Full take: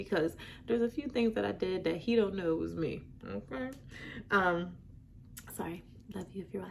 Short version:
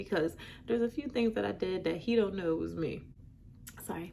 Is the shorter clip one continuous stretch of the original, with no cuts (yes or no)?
no